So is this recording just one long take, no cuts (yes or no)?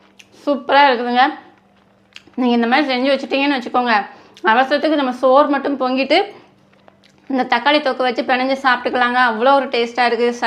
yes